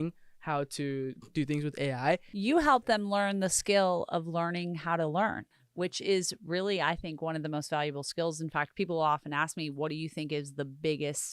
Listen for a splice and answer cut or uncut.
cut